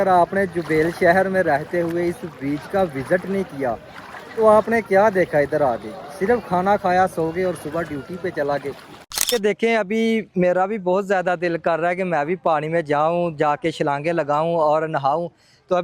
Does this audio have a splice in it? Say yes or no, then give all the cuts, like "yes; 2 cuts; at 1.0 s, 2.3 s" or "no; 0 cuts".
yes; 1 cut; at 9.3 s